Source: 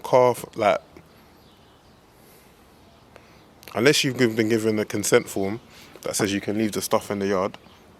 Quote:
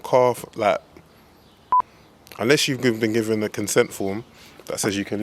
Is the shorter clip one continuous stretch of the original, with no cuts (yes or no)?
no